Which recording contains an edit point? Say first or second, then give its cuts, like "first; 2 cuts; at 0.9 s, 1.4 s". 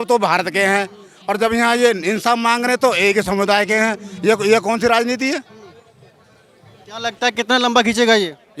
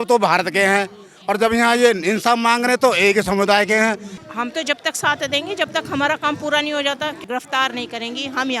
second; 2 cuts; at 4.1 s, 7.2 s